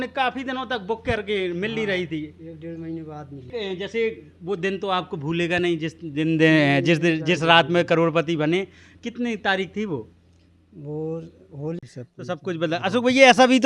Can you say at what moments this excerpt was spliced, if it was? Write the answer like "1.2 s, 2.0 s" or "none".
3.5 s, 11.8 s